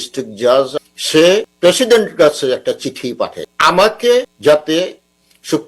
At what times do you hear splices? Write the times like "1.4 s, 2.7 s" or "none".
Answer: 1.0 s, 3.5 s, 4.3 s